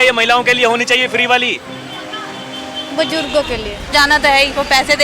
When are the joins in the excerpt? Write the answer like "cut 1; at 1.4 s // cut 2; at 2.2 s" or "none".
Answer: cut 1; at 3.9 s

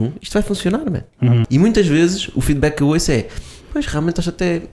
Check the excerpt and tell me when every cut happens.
cut 1; at 1.4 s

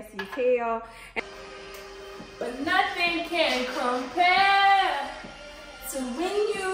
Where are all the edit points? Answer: cut 1; at 1.0 s

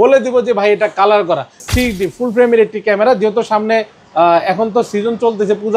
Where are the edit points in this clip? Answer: cut 1; at 1.6 s

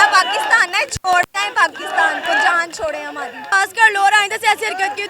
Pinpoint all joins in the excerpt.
cut 1; at 3.5 s

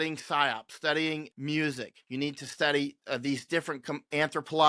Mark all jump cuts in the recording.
cut 1; at 1.4 s

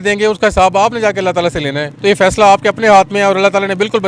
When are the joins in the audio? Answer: cut 1; at 1.9 s

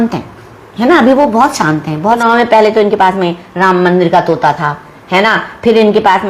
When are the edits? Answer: cut 1; at 2.2 s

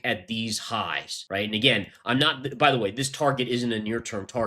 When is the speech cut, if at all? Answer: cut 1; at 1.1 s

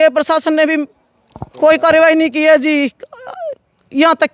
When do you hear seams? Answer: none

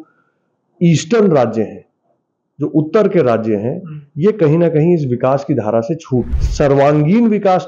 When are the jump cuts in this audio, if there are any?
cut 1; at 6.4 s

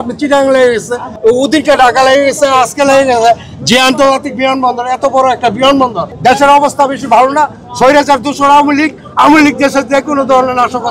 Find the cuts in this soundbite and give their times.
cut 1; at 1.0 s // cut 2; at 6.1 s

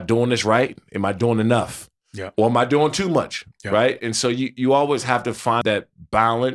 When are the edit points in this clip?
cut 1; at 5.6 s

